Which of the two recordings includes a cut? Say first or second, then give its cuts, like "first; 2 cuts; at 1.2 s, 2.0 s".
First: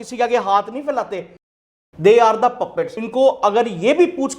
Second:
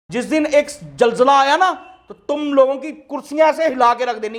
first; 2 cuts; at 1.5 s, 3.0 s